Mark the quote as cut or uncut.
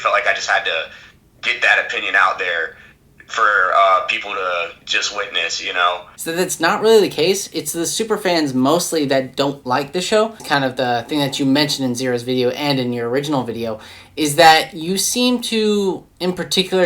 cut